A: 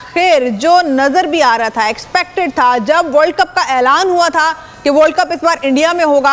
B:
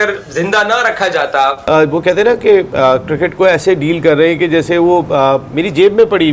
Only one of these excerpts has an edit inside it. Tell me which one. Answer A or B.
B